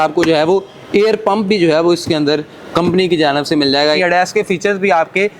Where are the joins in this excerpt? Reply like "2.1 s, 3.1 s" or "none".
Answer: 4.0 s